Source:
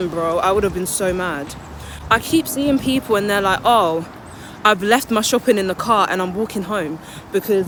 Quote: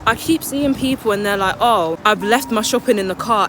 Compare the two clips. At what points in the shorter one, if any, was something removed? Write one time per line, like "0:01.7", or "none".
0:02.0